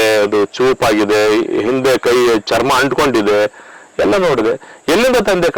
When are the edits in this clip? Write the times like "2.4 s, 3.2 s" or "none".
none